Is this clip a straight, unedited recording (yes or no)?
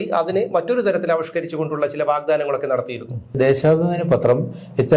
no